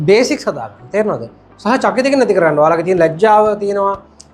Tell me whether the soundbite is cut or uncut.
uncut